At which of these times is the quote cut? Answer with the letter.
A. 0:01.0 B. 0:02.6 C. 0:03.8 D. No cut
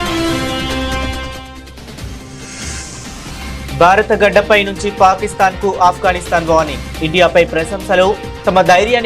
A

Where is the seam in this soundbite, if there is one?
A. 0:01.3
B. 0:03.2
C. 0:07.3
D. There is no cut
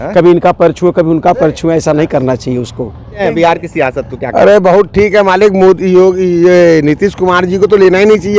B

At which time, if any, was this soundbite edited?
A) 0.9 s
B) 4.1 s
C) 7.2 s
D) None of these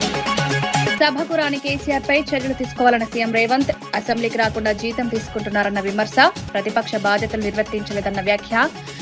A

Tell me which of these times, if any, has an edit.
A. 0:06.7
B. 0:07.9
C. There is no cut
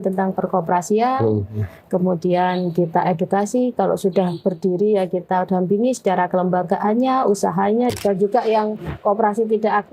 B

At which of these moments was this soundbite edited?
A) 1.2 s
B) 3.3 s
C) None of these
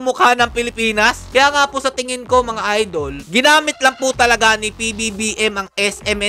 A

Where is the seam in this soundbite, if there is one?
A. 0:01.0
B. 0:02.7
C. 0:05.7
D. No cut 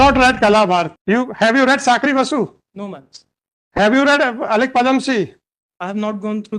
A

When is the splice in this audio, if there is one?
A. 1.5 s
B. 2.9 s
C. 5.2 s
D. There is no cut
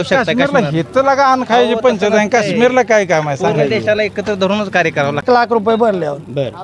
C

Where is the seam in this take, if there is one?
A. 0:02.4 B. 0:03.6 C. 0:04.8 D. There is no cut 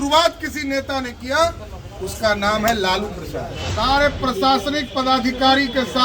B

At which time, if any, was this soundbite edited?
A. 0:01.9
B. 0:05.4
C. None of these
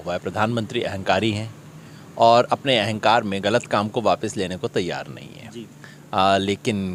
C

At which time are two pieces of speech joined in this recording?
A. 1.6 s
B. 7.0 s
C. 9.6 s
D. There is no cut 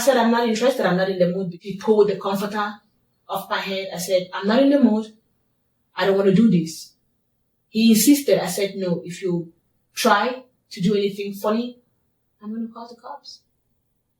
A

